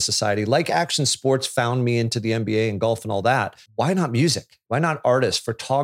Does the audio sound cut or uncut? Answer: cut